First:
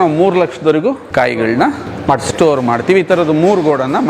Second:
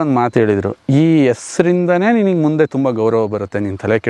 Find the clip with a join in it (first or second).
first